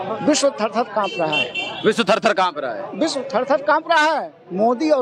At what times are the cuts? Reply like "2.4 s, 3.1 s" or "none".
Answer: none